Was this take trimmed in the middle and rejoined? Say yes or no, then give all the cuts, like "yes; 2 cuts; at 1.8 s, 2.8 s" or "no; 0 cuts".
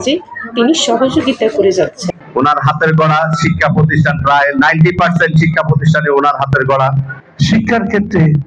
yes; 2 cuts; at 2.1 s, 7.3 s